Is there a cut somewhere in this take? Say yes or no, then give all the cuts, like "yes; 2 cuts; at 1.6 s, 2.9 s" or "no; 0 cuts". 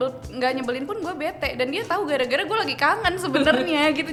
no; 0 cuts